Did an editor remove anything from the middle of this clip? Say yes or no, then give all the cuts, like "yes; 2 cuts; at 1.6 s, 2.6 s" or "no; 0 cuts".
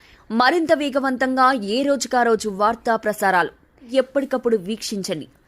yes; 1 cut; at 3.8 s